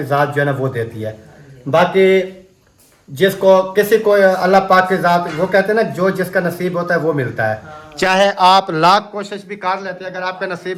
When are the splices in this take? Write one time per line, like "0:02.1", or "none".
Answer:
none